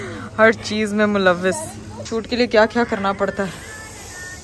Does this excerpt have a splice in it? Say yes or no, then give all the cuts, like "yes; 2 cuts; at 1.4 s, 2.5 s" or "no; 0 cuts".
yes; 1 cut; at 2.0 s